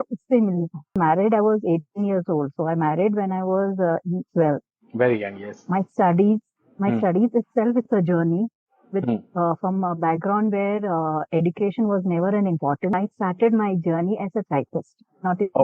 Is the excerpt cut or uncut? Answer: cut